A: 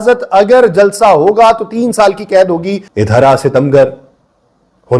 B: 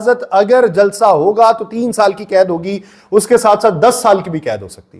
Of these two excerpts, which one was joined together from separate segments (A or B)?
A